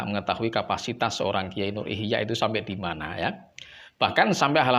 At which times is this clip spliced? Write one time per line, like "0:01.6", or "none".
none